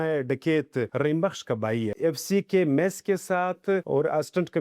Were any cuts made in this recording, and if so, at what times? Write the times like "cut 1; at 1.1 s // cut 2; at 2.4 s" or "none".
cut 1; at 0.9 s // cut 2; at 1.9 s // cut 3; at 3.8 s